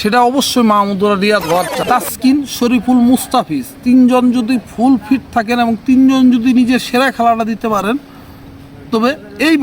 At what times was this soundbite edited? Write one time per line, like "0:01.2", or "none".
0:01.8

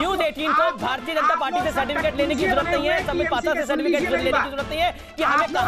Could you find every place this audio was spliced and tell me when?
none

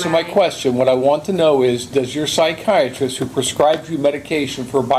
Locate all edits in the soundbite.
none

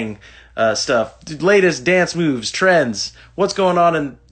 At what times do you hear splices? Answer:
none

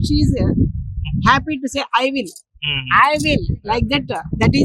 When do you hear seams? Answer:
none

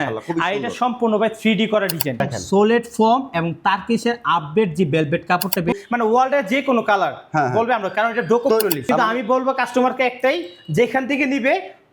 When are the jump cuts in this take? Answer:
0:02.2
0:05.8
0:08.8

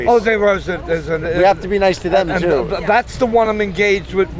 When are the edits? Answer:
none

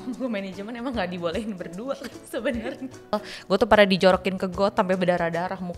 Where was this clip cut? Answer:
0:03.3

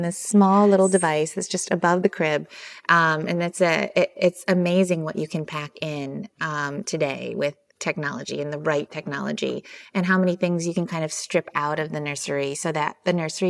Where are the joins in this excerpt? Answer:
none

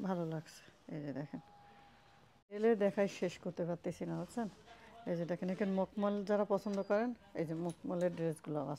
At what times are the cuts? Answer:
0:02.6

